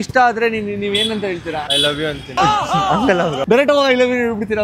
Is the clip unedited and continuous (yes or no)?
no